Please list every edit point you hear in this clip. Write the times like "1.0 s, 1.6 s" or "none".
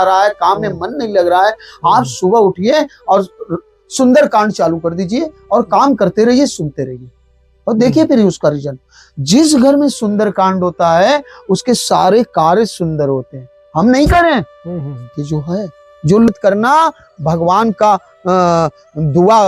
16.3 s